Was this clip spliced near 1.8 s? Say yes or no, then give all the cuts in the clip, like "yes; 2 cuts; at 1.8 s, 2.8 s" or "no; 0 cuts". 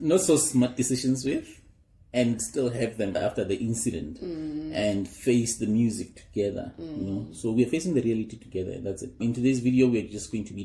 no; 1 cut; at 9.2 s